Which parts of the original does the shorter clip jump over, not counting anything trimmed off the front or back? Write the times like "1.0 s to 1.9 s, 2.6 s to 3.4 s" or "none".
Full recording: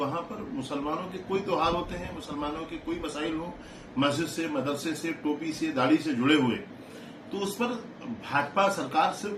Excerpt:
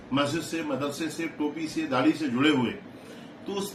none

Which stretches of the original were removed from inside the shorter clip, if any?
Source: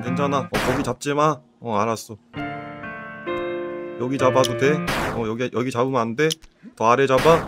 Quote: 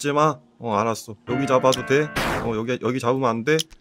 2.2 s to 3.9 s

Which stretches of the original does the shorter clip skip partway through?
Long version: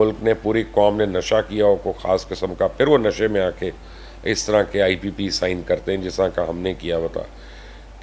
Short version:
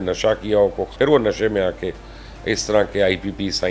2.0 s to 2.7 s

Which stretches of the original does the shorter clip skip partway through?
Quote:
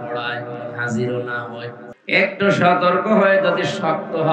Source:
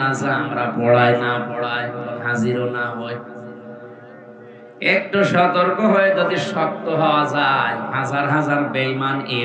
3.4 s to 4.6 s

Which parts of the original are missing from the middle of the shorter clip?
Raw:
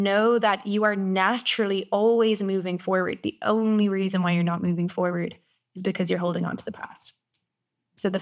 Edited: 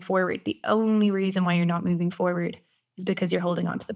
none

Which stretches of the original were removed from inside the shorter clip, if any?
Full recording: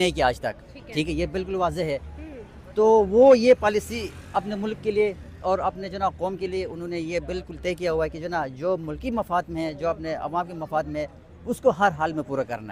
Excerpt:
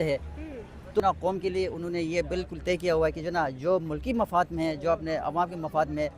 2.8 s to 6.0 s

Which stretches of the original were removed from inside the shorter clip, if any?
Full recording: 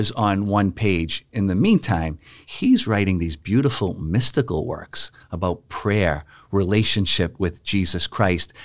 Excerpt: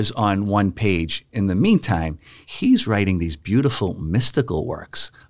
none

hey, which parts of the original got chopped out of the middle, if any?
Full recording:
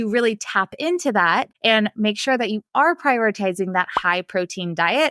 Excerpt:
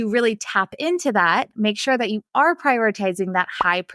1.5 s to 1.9 s

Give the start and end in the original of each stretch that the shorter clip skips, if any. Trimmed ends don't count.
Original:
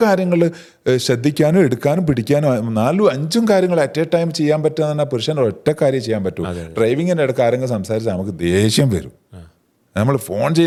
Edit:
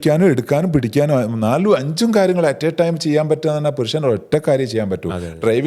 none

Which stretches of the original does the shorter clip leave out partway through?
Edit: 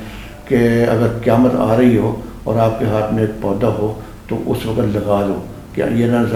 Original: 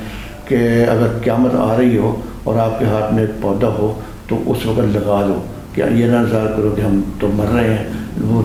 none

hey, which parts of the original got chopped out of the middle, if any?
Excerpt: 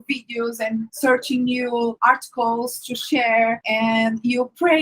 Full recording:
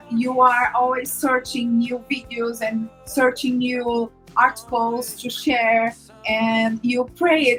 2.9 s to 3.0 s, 4.1 s to 4.3 s, 6.0 s to 6.2 s

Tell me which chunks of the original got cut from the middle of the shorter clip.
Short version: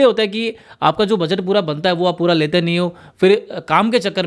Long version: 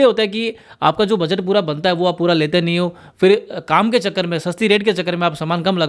none

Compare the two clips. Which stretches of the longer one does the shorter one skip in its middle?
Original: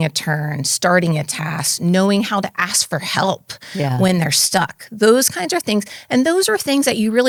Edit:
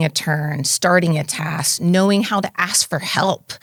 none

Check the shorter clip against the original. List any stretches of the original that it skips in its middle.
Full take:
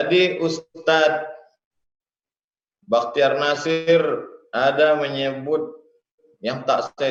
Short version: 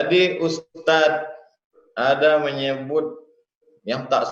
1.8 s to 4.4 s

